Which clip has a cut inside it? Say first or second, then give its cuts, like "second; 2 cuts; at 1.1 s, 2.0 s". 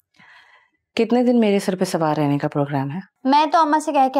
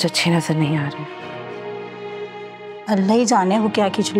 first; 1 cut; at 3.0 s